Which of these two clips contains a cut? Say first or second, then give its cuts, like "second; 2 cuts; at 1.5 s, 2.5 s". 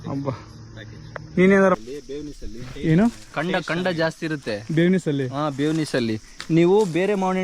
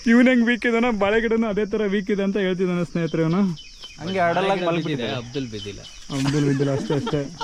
first; 1 cut; at 1.8 s